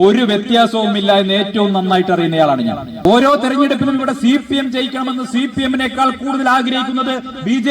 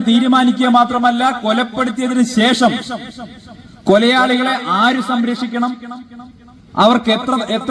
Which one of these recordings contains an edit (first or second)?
first